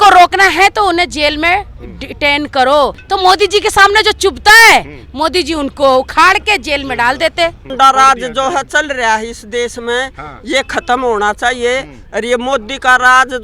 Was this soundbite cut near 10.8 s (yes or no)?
no